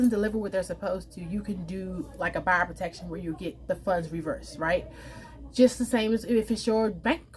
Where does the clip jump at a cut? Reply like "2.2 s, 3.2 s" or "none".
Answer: none

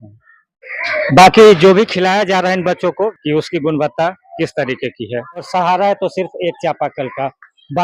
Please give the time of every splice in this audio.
3.1 s, 5.4 s

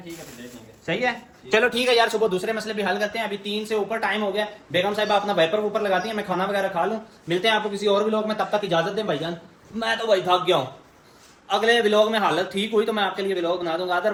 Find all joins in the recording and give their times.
none

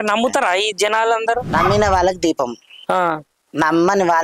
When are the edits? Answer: 1.5 s

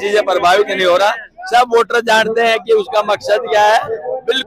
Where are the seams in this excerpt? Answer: none

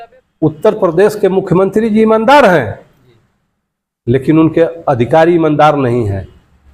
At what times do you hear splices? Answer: none

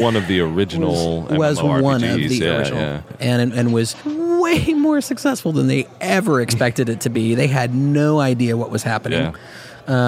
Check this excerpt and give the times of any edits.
3.0 s, 4.0 s

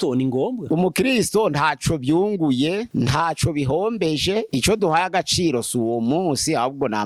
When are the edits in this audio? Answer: none

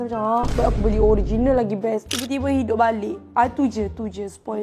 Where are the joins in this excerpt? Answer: 2.1 s

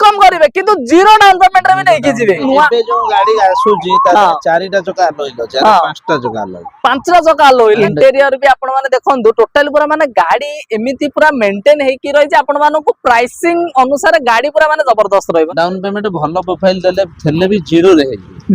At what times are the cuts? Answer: 2.4 s, 7.8 s, 15.5 s

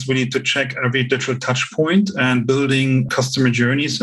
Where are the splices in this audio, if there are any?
3.1 s

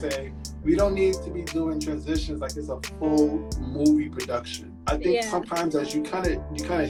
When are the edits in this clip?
none

